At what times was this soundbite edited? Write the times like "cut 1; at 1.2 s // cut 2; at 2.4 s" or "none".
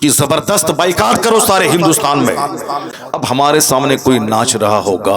cut 1; at 3.0 s